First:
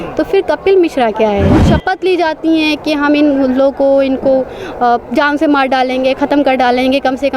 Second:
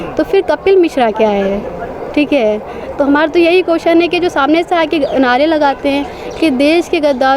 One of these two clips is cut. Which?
first; 1 cut; at 1.6 s

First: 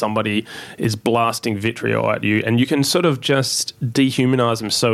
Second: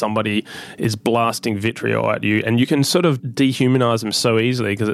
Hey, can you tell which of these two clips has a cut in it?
second; 1 cut; at 3.2 s

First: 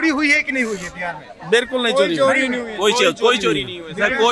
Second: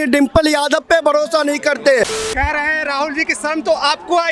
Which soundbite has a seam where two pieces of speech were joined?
second; 1 cut; at 2.2 s

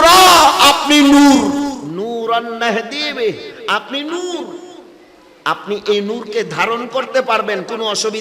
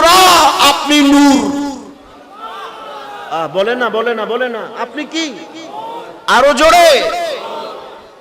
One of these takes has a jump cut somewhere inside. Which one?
first; 1 cut; at 1.8 s

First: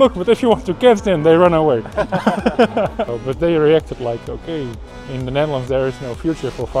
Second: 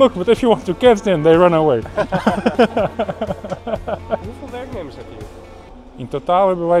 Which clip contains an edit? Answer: first; 1 cut; at 3.1 s

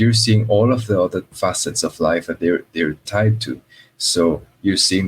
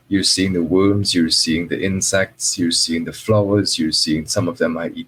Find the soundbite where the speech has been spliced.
first; 2 cuts; at 1.3 s, 3.0 s

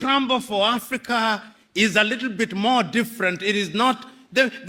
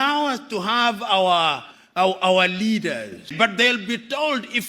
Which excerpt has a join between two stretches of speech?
second; 1 cut; at 3.3 s

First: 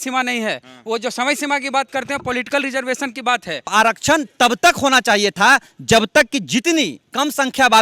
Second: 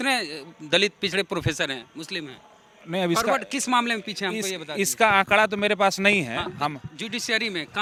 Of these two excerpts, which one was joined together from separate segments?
first; 1 cut; at 3.6 s

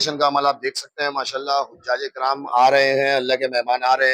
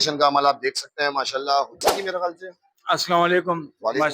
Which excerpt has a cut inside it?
second; 1 cut; at 1.8 s

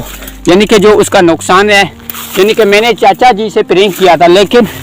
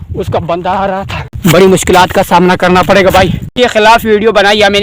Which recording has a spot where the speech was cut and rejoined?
second; 2 cuts; at 1.6 s, 3.7 s

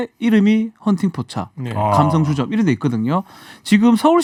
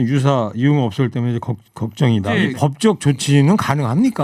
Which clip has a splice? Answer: second; 1 cut; at 2.4 s

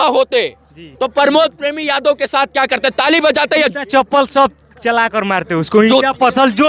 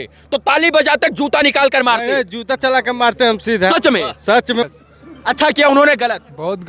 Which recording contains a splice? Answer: second; 1 cut; at 4.7 s

